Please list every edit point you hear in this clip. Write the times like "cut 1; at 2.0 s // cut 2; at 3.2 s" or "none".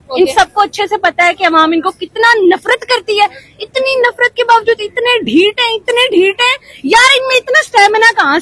none